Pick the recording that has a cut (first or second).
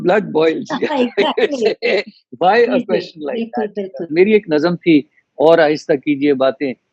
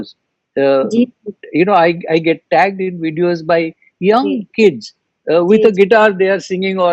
first